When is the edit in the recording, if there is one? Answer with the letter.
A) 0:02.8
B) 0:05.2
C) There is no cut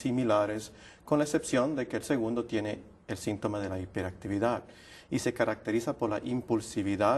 C